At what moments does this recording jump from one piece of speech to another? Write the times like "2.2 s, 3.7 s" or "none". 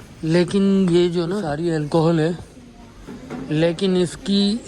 1.4 s